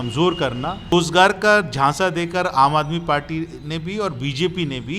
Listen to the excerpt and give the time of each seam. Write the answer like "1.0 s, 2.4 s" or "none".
0.9 s

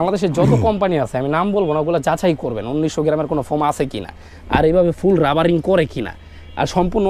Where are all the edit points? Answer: none

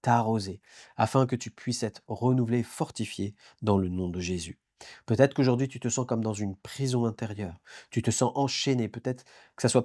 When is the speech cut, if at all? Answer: 4.6 s

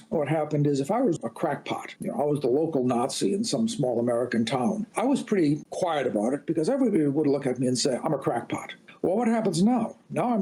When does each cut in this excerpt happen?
none

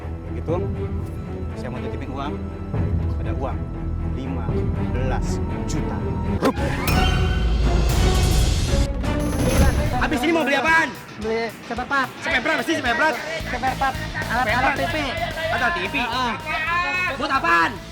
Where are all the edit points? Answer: 9.8 s

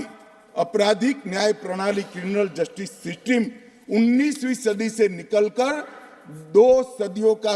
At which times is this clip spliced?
none

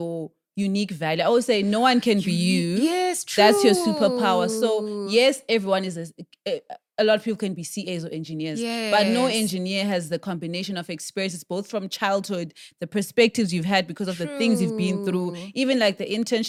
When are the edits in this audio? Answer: none

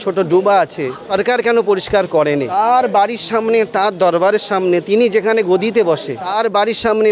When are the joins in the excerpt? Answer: 1.0 s, 2.5 s, 6.2 s

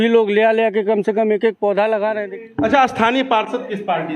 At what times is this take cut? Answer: 2.3 s

